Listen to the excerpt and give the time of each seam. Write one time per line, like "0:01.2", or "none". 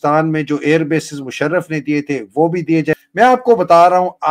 none